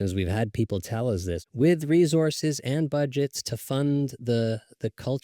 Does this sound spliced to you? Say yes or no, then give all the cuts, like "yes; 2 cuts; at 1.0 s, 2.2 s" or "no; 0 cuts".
yes; 1 cut; at 1.4 s